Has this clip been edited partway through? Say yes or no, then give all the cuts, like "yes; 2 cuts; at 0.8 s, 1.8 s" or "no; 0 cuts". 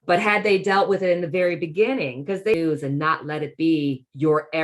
yes; 1 cut; at 2.5 s